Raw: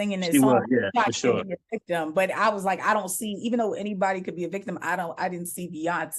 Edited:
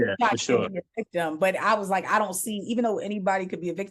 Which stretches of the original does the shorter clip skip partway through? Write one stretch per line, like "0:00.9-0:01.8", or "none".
none